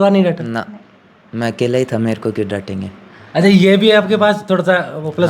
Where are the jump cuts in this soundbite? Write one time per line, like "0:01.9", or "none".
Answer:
none